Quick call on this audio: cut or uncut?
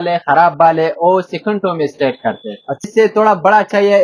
cut